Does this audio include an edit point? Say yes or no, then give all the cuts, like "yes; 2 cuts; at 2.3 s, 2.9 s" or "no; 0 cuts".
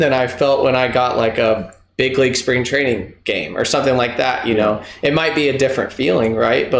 no; 0 cuts